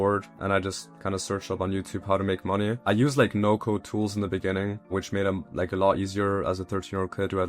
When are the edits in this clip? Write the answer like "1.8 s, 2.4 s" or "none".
2.8 s, 4.9 s

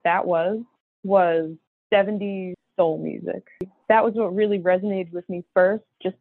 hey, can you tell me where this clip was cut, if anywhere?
3.7 s

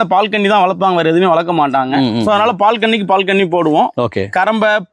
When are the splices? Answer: none

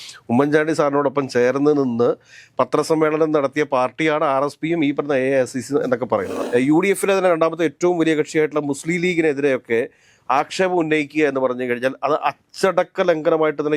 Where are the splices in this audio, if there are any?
6.4 s

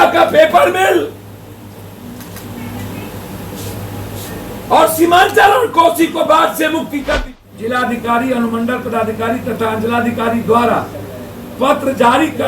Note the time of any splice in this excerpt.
7.3 s

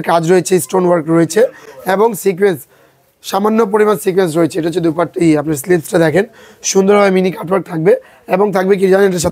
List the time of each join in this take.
none

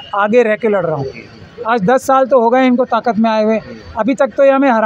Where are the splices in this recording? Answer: none

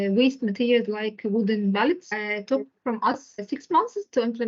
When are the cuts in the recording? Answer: 2.1 s, 3.4 s

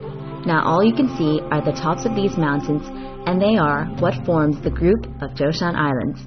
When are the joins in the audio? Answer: 1.5 s

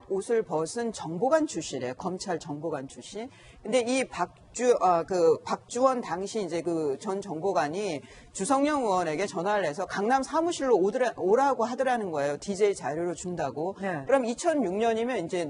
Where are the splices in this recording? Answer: none

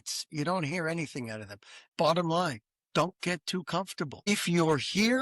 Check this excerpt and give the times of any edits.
1.8 s, 4.2 s

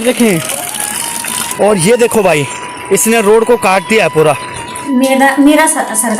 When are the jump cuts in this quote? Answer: 1.4 s, 4.9 s

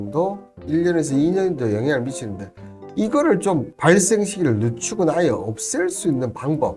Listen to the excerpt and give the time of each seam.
3.7 s

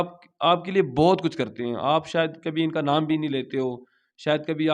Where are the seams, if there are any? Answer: none

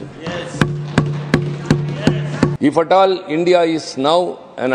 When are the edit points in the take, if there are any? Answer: 2.5 s

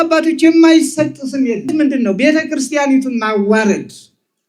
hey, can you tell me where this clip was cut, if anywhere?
1.7 s

